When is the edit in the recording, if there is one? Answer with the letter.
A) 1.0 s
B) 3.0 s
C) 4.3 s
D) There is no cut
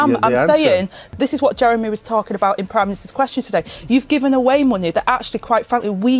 A